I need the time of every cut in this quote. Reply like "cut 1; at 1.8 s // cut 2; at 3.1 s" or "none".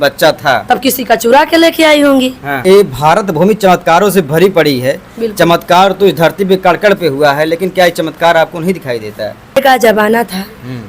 cut 1; at 2.5 s // cut 2; at 9.6 s